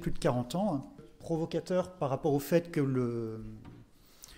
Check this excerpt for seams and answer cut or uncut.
cut